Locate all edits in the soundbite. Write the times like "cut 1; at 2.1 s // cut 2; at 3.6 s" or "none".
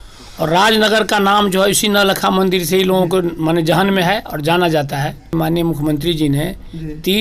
cut 1; at 5.3 s